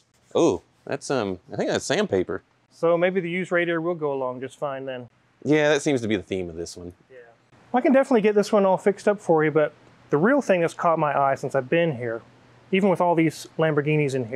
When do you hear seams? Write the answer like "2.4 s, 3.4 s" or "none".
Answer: none